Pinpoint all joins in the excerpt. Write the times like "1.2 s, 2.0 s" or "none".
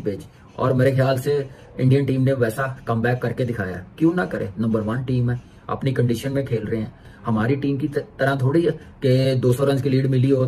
none